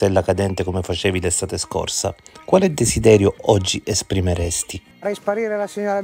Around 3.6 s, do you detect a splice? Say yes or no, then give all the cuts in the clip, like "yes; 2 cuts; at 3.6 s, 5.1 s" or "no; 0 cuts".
no; 1 cut; at 5.0 s